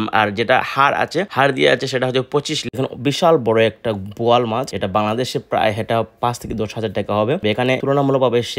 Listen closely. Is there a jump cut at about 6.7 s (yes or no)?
no